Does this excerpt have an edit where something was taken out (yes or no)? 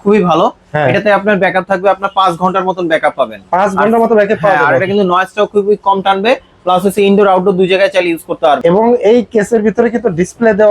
yes